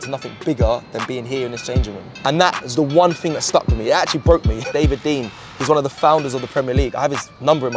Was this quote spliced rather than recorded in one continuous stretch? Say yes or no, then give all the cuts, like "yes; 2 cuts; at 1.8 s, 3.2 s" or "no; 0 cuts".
yes; 2 cuts; at 2.2 s, 4.7 s